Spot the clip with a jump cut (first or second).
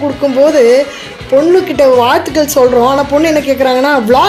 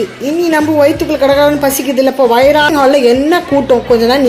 second